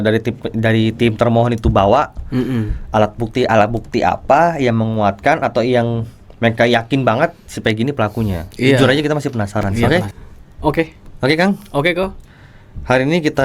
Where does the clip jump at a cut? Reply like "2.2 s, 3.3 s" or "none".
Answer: 9.9 s

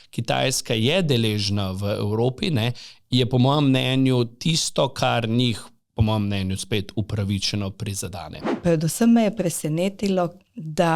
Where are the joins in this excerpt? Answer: 8.4 s

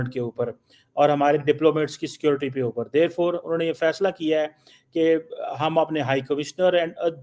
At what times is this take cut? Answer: none

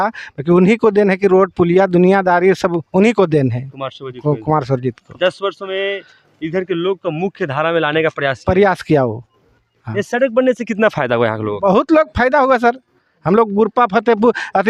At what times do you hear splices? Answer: none

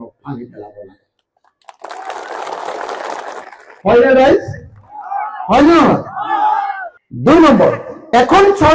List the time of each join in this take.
none

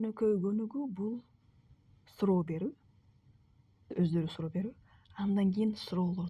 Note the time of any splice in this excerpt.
none

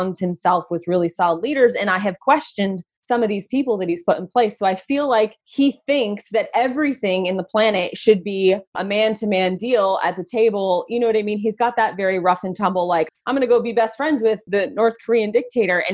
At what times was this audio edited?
2.9 s, 5.4 s, 8.8 s, 13.1 s, 14.4 s

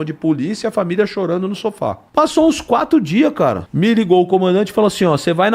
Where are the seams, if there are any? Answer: 2.0 s, 3.7 s

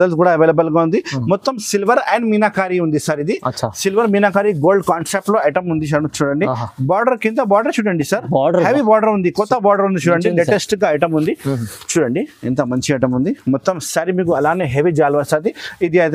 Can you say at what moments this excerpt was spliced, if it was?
none

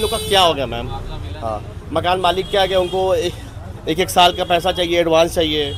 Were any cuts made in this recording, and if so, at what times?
none

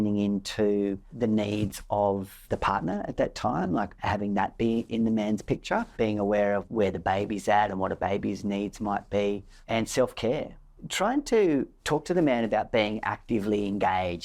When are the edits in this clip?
1.1 s, 2.4 s, 4.0 s, 4.9 s, 5.9 s, 9.5 s, 10.6 s

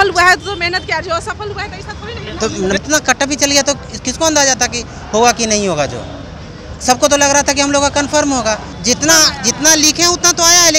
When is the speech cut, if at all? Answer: 2.8 s, 8.7 s

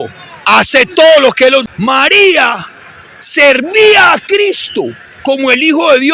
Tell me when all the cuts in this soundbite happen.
1.7 s

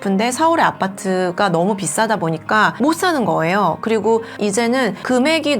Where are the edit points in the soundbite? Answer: 4.3 s

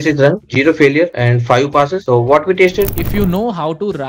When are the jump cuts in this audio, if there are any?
2.9 s

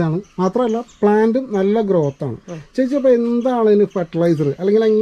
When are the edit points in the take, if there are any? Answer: none

